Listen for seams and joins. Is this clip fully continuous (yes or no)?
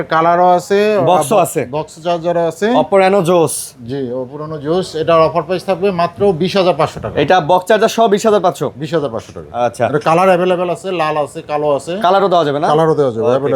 yes